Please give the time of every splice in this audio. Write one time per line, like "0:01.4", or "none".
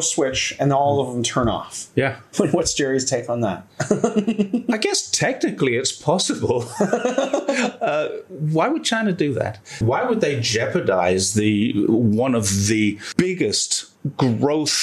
0:09.8
0:13.0